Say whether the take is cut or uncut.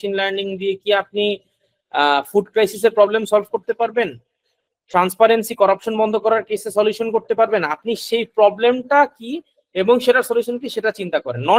uncut